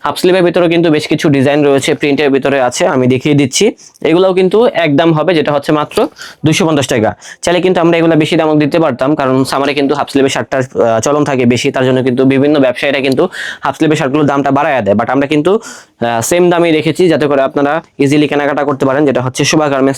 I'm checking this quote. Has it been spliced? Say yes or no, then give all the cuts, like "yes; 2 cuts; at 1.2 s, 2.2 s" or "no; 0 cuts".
no; 0 cuts